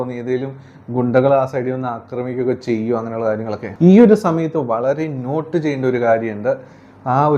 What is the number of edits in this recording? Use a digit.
1